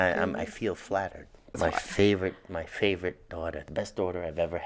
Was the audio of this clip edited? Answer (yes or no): yes